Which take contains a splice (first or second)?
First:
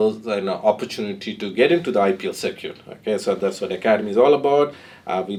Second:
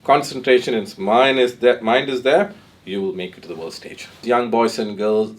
second